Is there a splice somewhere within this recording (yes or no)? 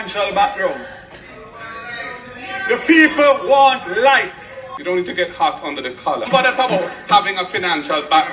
yes